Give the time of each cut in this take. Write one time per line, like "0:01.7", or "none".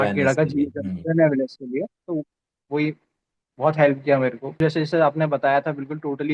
0:04.6